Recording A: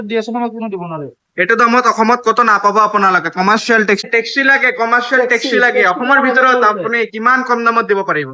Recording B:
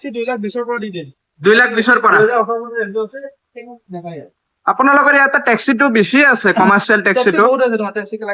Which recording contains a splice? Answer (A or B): A